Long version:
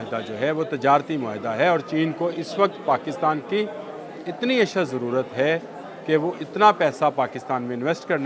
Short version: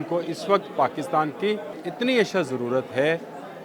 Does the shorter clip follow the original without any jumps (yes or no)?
no